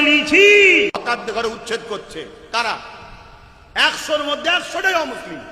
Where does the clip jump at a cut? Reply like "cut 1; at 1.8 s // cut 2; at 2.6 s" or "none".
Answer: cut 1; at 1.0 s